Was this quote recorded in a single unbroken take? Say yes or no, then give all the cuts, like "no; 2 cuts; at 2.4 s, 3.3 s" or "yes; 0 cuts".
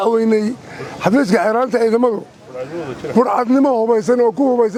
yes; 0 cuts